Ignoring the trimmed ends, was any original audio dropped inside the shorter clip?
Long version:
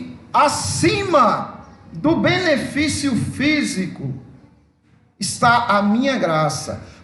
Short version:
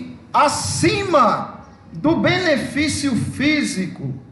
no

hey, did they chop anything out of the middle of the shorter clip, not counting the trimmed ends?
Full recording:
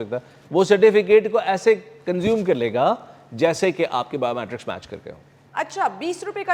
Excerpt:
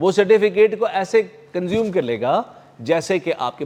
no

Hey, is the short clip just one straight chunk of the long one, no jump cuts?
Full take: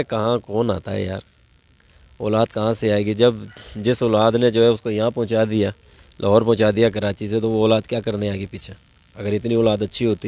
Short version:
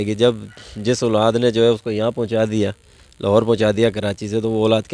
yes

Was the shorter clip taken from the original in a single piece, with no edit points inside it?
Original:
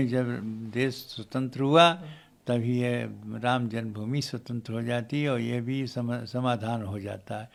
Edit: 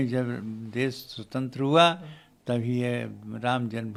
yes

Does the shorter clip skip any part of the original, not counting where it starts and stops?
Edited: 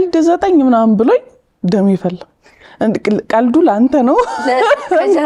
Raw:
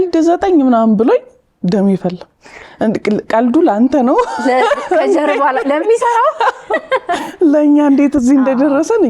no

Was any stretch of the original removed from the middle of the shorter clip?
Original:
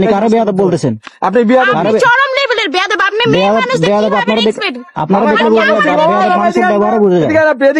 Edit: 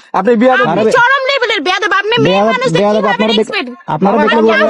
no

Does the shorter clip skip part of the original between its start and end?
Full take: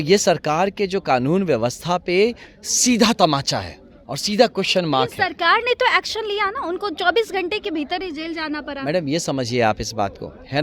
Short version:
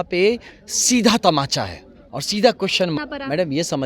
yes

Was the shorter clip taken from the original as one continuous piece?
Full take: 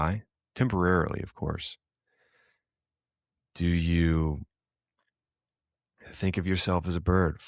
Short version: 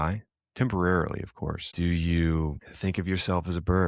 no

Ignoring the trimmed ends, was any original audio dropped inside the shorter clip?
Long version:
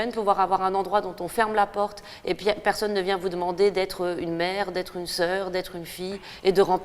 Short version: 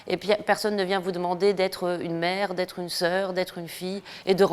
no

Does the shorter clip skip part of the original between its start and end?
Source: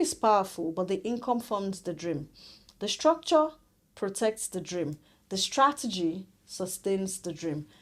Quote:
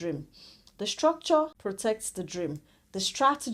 yes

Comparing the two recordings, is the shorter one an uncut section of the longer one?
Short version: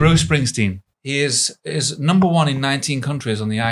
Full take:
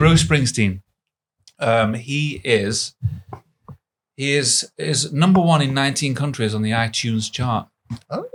no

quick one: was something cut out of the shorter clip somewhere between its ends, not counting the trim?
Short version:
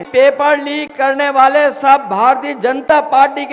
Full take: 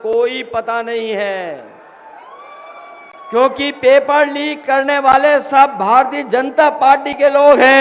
no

